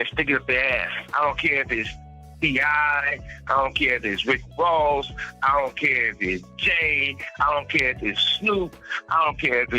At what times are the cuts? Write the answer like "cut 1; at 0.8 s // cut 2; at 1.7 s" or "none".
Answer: cut 1; at 1.0 s